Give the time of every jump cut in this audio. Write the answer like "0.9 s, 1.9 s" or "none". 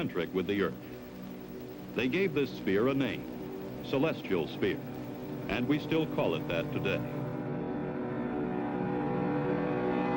1.1 s